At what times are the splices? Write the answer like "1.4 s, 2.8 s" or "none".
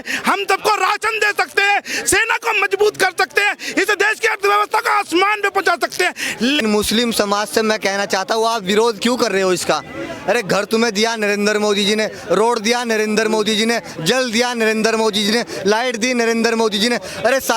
6.6 s